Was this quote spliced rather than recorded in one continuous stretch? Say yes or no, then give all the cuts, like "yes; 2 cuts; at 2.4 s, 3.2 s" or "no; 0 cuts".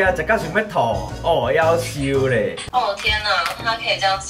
yes; 1 cut; at 2.6 s